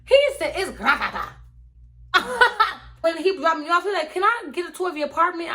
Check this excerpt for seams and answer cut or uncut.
cut